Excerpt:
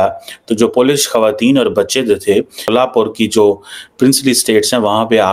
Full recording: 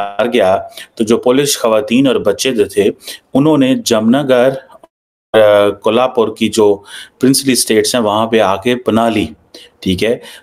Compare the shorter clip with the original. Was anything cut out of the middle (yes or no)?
yes